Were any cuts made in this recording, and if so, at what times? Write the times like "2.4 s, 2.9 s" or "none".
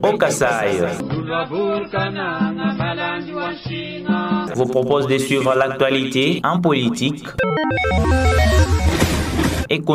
0.9 s